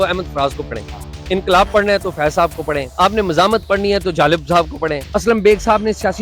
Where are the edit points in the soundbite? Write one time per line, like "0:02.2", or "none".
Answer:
0:01.2
0:02.9
0:05.1